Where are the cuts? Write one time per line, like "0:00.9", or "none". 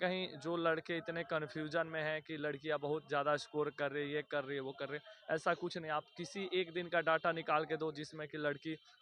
none